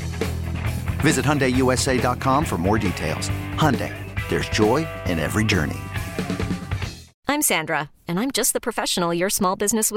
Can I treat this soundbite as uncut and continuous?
no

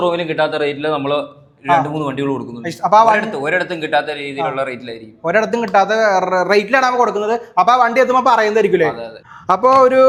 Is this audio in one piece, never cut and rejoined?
yes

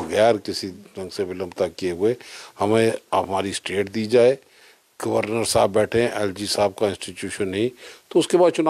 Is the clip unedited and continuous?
yes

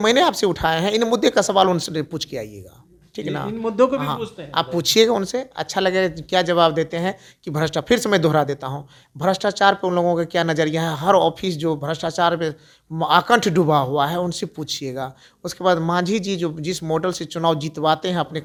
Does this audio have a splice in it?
no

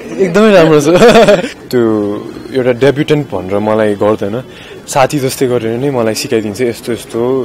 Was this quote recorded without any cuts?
no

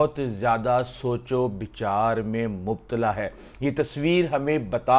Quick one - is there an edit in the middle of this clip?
no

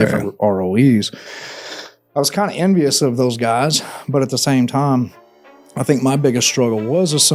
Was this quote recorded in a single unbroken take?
yes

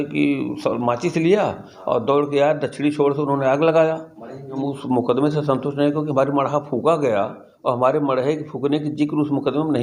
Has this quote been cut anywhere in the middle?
yes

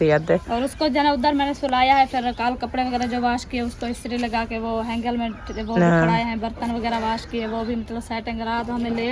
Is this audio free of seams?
yes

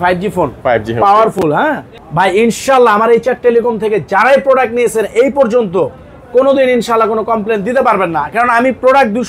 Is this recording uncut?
no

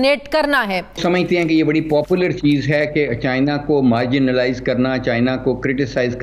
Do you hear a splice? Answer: yes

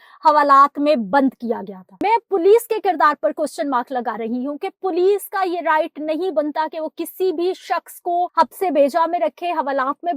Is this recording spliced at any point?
yes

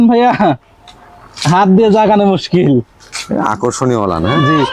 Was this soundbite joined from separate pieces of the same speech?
no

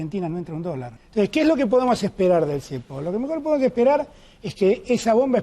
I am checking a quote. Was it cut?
yes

